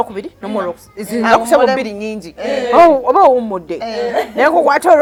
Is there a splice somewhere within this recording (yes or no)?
no